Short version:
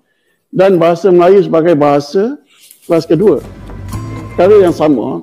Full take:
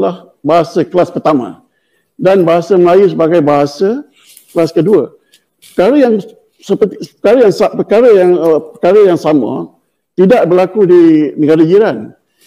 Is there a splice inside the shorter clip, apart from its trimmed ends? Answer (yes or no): yes